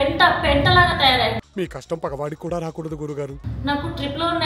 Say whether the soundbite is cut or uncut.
cut